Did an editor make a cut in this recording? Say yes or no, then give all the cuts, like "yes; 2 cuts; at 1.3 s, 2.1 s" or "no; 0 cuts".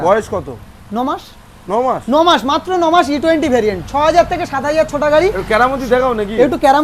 no; 0 cuts